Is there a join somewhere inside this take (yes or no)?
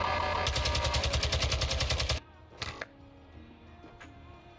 yes